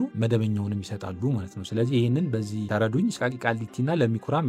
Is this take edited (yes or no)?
yes